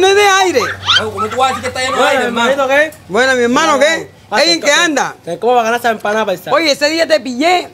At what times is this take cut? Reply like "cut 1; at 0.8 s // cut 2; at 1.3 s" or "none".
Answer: none